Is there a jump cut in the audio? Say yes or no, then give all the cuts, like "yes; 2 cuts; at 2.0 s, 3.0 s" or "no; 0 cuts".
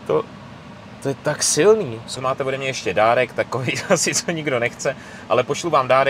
yes; 1 cut; at 2.2 s